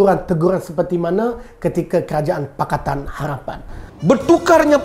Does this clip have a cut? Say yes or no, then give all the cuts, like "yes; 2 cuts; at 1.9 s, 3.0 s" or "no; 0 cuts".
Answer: yes; 1 cut; at 3.7 s